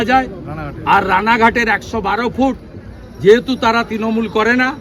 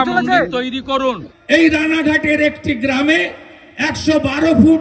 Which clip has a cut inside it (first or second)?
second